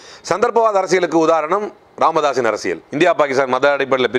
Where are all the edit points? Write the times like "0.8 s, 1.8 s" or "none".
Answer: 2.8 s

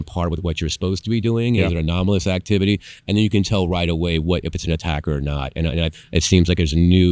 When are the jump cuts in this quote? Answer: 5.9 s

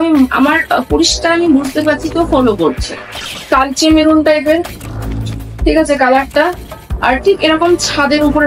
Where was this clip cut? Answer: 3.4 s

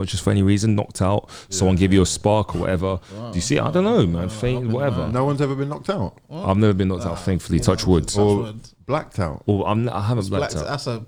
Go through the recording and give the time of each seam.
none

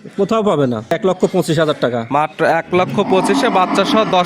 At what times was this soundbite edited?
0.9 s

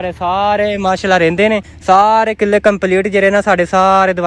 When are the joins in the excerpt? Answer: 1.7 s

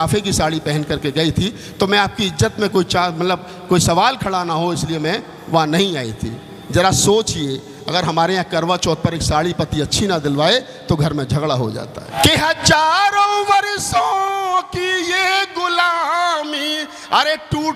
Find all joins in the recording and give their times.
12.1 s

